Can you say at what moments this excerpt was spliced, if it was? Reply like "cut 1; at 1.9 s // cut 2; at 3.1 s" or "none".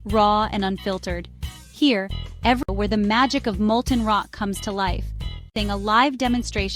cut 1; at 2.6 s // cut 2; at 5.5 s